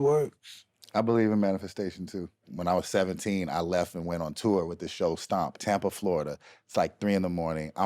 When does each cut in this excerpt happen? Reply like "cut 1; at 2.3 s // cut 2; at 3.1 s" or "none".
cut 1; at 2.5 s // cut 2; at 5.6 s

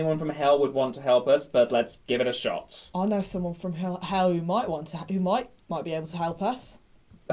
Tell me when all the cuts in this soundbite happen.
none

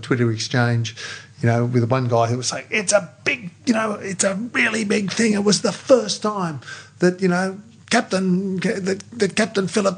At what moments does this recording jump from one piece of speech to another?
none

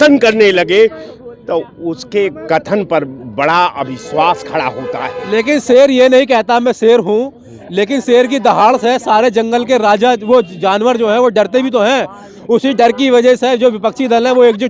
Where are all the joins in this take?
none

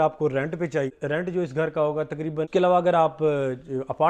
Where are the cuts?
cut 1; at 0.9 s // cut 2; at 2.5 s

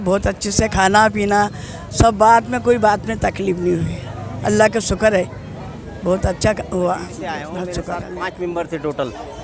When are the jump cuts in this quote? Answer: cut 1; at 7.0 s

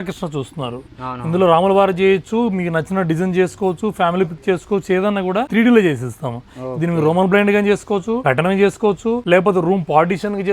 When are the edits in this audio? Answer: cut 1; at 5.5 s // cut 2; at 8.2 s // cut 3; at 9.2 s

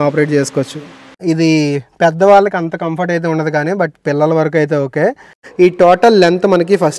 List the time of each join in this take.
cut 1; at 1.2 s // cut 2; at 5.4 s

